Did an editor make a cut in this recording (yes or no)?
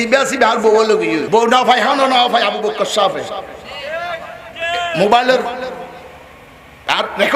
yes